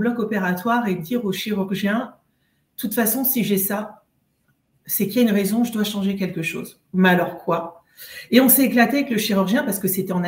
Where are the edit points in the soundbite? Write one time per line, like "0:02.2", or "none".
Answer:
none